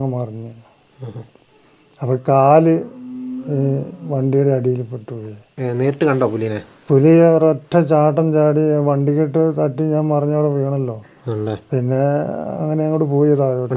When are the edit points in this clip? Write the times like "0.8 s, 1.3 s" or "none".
5.5 s